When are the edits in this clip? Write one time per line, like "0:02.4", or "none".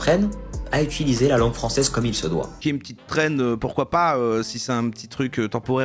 0:02.6